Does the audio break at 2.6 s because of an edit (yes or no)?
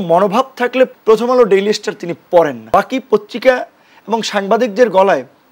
yes